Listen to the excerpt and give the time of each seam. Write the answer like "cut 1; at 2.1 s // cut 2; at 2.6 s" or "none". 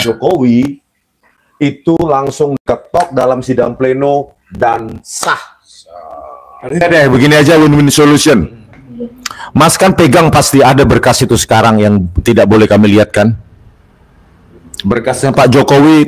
cut 1; at 6.8 s